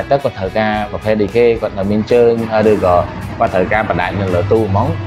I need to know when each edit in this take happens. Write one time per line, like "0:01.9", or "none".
none